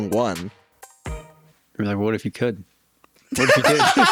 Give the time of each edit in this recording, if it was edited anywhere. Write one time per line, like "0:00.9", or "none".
none